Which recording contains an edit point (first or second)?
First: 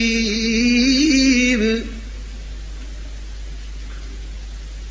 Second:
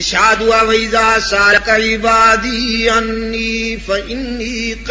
second